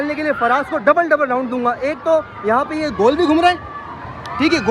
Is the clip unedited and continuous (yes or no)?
yes